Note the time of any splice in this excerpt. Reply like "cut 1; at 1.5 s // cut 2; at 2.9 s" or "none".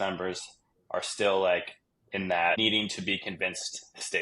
cut 1; at 2.6 s